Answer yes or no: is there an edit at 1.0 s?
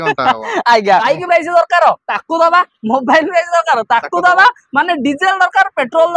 yes